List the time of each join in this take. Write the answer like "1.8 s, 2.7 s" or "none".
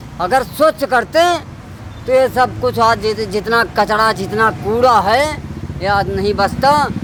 none